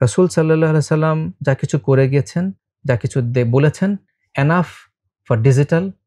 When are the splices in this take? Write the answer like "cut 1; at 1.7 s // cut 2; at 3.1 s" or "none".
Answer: cut 1; at 1.3 s // cut 2; at 2.7 s